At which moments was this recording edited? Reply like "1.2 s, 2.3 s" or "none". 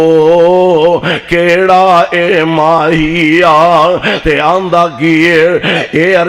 none